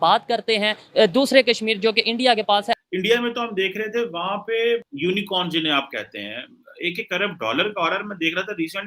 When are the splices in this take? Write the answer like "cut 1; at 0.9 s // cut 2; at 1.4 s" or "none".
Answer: cut 1; at 2.8 s // cut 2; at 4.9 s